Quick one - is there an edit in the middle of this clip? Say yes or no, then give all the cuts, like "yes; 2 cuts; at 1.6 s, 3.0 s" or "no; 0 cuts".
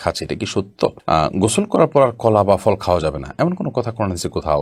no; 0 cuts